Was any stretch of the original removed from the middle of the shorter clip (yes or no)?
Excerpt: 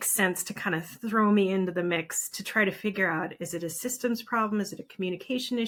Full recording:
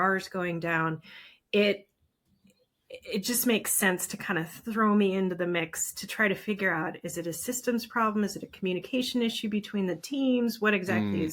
no